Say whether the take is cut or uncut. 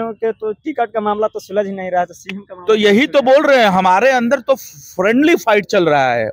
uncut